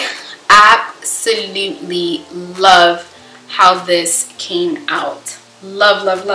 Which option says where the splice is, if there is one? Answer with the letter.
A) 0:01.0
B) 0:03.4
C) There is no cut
C